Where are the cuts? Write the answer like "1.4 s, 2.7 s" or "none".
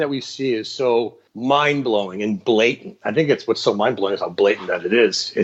1.2 s